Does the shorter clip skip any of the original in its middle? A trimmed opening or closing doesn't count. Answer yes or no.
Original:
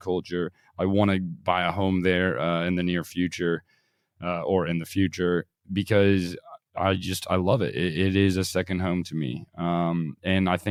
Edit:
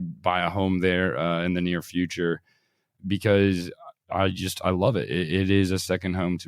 yes